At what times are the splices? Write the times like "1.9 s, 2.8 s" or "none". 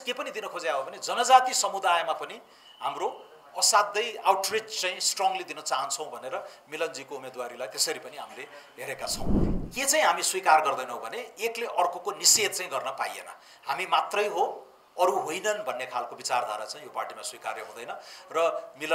9.4 s